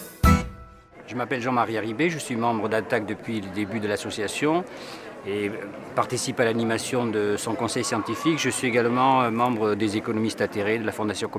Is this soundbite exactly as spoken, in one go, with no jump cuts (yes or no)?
no